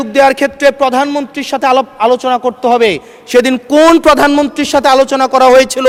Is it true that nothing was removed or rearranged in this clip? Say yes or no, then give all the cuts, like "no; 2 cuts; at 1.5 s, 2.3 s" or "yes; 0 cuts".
yes; 0 cuts